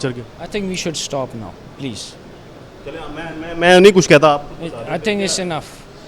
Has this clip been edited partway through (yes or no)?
no